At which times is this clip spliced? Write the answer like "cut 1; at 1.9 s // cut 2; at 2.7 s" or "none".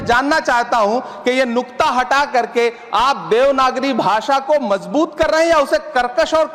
none